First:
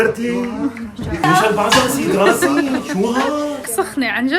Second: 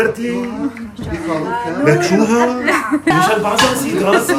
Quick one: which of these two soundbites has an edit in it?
first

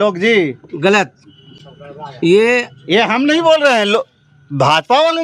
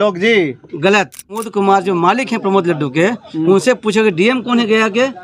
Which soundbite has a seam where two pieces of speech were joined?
second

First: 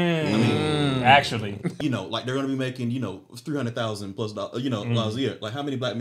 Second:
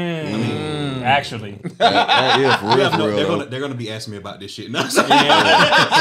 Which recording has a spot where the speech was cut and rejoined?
first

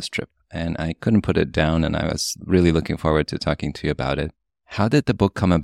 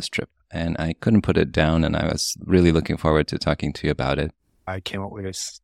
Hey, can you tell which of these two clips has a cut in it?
second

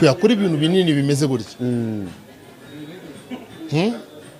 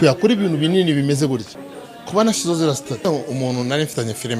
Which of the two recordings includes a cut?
second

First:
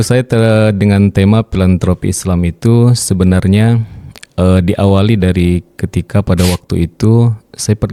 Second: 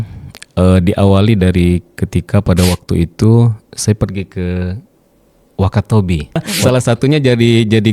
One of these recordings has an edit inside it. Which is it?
second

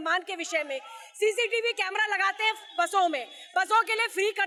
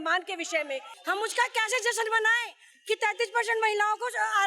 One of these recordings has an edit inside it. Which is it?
second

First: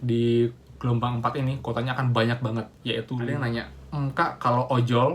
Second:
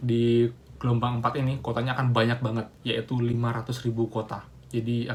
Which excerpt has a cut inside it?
first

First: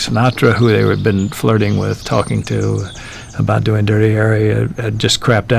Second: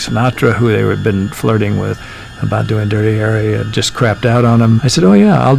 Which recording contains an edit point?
second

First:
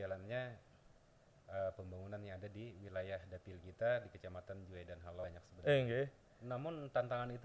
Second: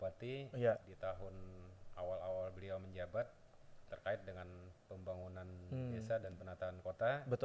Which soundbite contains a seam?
first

